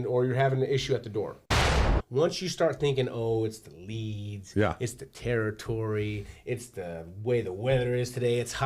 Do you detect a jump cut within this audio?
yes; 1 cut; at 1.6 s

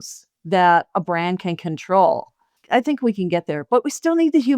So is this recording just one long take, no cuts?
no; 1 cut; at 2.6 s

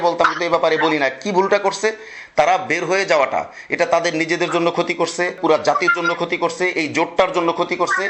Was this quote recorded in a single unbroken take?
yes; 0 cuts

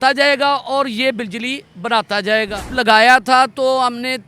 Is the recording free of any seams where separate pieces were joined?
no; 1 cut; at 2.7 s

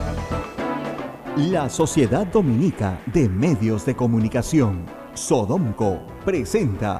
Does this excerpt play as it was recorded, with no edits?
no; 1 cut; at 1.2 s

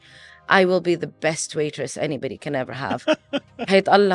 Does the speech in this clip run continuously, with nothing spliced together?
yes; 0 cuts

